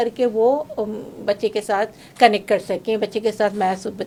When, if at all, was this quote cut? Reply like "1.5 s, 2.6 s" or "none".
none